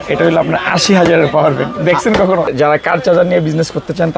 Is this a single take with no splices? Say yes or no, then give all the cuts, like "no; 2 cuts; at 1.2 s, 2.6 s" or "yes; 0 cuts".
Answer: no; 1 cut; at 2.5 s